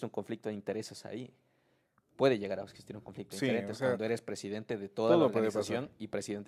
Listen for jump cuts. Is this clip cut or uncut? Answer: uncut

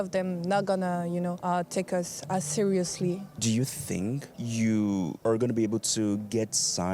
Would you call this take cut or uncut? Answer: cut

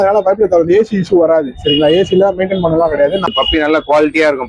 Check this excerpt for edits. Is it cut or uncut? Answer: cut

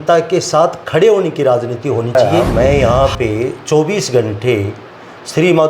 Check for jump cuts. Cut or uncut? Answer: cut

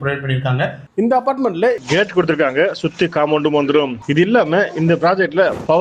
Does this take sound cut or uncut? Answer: cut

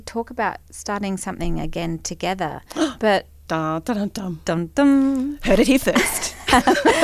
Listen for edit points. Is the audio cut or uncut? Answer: uncut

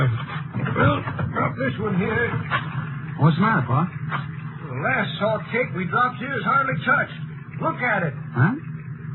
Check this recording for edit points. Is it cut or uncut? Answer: cut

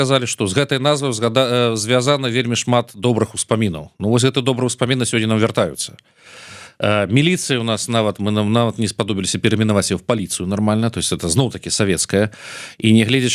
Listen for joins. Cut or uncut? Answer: uncut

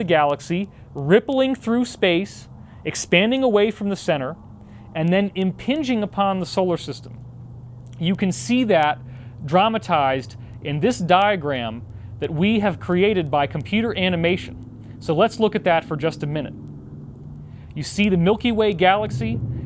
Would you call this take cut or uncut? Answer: cut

